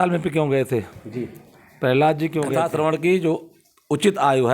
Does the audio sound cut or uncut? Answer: cut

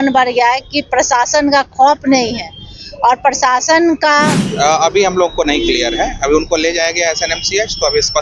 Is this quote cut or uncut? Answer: cut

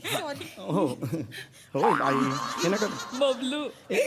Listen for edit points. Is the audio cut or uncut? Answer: uncut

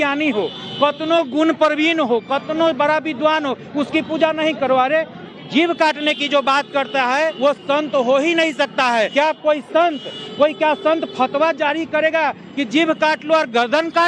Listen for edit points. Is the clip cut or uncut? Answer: cut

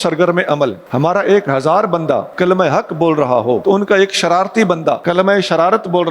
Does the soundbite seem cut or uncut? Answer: cut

